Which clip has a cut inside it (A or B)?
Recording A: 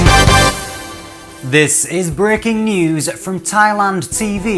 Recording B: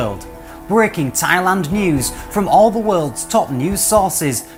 A